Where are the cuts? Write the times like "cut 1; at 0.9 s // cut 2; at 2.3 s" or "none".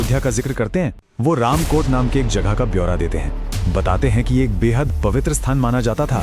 cut 1; at 1.1 s